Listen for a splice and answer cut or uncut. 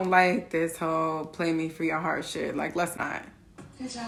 uncut